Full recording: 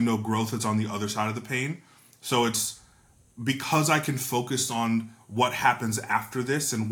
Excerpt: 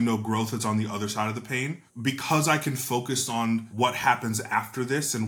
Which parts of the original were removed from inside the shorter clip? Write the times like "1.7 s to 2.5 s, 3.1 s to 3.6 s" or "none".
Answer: 1.8 s to 3.3 s, 5.1 s to 5.3 s